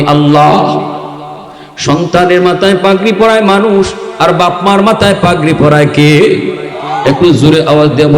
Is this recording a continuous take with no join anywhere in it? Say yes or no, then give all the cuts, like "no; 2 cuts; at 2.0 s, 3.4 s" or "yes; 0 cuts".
yes; 0 cuts